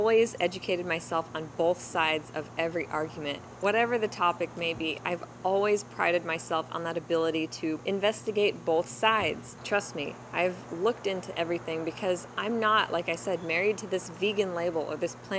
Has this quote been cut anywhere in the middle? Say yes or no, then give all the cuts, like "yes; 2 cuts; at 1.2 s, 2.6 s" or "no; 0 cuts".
yes; 3 cuts; at 3.5 s, 7.8 s, 9.5 s